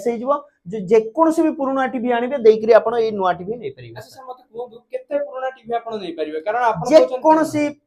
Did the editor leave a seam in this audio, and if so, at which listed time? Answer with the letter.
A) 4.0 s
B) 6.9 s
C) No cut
C